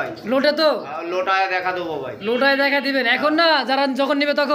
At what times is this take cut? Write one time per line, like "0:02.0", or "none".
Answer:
none